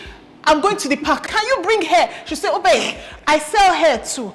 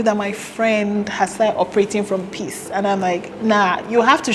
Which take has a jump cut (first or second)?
first